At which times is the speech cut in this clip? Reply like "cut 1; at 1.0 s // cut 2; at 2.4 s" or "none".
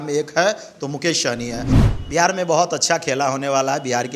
cut 1; at 1.8 s